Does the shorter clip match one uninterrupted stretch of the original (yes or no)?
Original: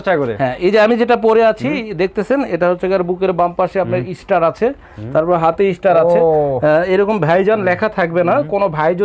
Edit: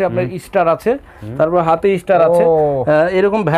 yes